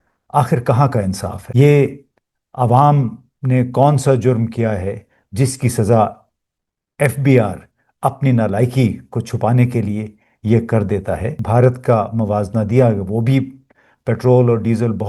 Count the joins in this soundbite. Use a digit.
2